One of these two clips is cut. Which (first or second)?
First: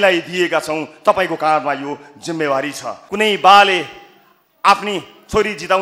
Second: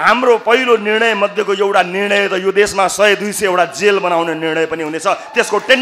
first